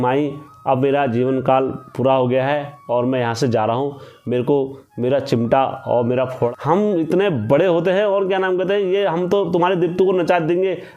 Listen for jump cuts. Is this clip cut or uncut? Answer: cut